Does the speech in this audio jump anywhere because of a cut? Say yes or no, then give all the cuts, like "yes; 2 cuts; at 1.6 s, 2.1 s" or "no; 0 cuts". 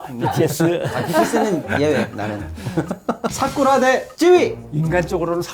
yes; 1 cut; at 3.2 s